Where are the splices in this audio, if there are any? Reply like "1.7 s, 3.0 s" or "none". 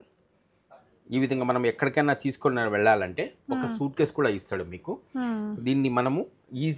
none